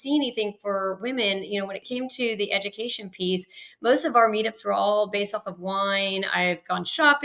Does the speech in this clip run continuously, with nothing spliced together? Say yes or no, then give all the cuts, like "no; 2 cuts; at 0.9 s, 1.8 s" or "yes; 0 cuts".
no; 1 cut; at 1.8 s